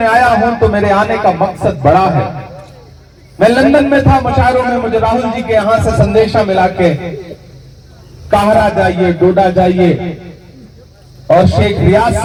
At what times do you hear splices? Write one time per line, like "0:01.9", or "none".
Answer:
none